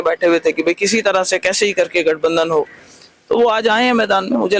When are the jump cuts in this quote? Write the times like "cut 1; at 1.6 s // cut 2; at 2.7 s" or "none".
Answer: none